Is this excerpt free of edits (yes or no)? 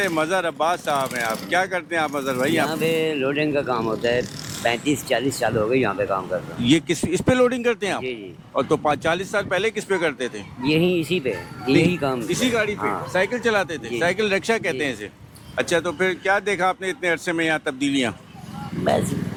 yes